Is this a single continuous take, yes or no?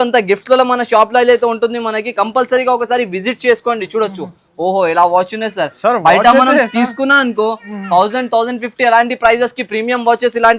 yes